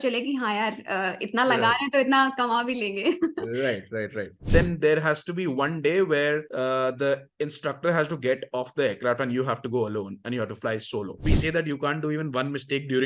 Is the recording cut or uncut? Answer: cut